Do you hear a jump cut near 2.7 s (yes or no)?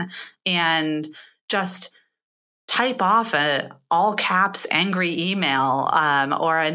no